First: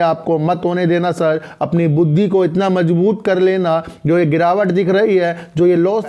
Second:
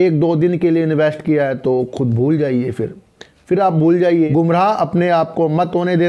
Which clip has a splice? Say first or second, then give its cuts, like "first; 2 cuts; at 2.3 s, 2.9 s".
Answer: second; 1 cut; at 4.2 s